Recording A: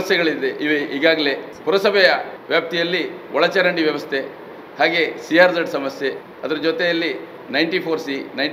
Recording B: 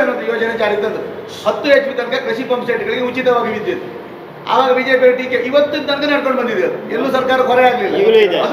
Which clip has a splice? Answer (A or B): A